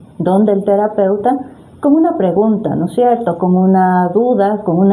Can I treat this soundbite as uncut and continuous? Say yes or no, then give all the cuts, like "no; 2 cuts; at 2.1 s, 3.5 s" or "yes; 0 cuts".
yes; 0 cuts